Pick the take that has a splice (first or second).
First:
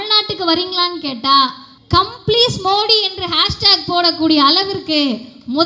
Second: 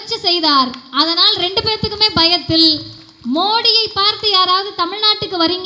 first